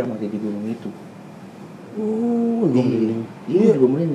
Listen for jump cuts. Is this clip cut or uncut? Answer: uncut